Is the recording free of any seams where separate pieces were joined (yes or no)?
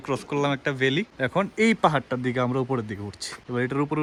yes